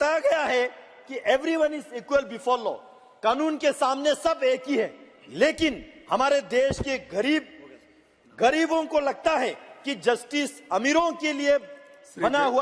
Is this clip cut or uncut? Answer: uncut